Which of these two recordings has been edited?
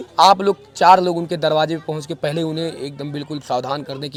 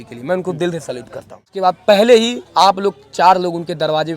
second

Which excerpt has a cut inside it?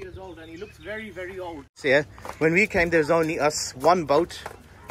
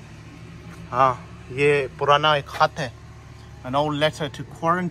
first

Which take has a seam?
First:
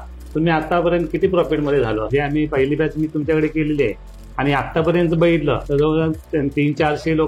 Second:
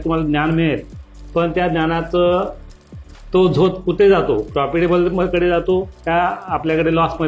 first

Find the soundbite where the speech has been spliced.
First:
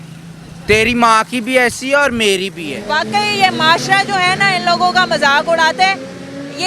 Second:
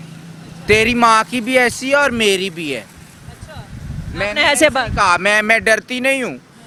first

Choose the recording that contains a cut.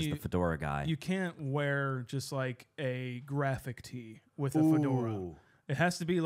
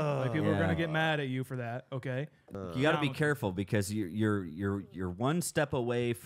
second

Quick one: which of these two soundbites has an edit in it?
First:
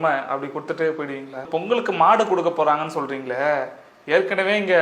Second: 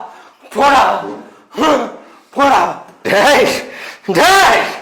first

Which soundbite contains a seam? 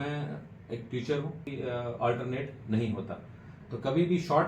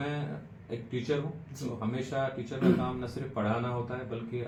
first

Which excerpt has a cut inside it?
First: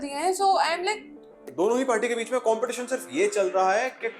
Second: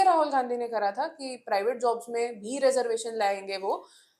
first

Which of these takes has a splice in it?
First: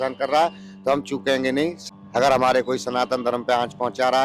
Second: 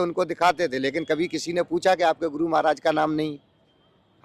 first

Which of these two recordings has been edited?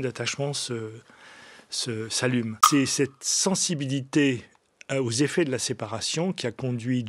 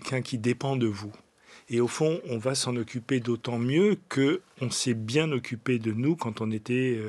first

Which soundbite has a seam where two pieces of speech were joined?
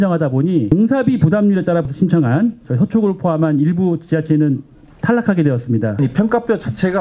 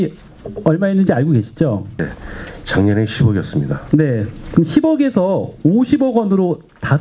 first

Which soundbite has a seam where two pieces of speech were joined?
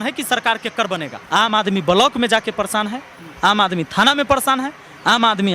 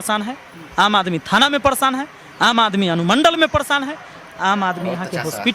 first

